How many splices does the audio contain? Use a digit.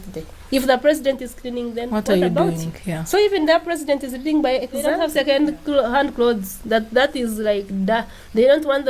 1